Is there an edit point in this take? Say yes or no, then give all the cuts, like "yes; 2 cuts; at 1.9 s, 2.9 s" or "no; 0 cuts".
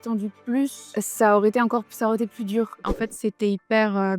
yes; 1 cut; at 2.9 s